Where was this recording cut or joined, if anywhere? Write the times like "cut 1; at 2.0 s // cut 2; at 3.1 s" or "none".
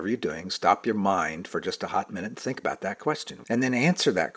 cut 1; at 3.3 s